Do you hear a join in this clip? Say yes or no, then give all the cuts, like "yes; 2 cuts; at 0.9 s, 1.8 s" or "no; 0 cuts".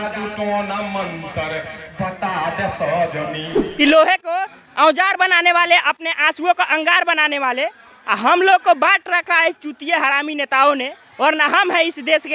yes; 1 cut; at 3.6 s